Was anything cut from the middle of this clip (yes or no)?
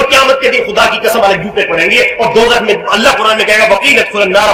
no